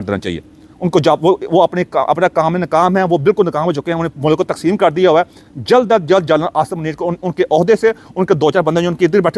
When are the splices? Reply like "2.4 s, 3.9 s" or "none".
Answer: none